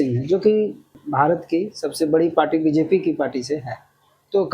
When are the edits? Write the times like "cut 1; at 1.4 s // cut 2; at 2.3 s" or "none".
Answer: cut 1; at 1.0 s